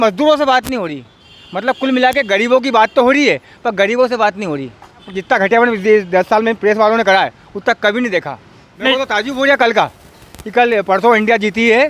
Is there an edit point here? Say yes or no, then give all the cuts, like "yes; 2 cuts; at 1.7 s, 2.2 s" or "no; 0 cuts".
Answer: yes; 2 cuts; at 5.1 s, 8.8 s